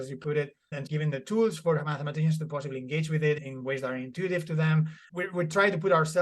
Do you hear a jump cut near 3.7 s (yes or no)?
no